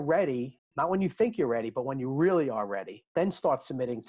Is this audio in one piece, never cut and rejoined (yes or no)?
no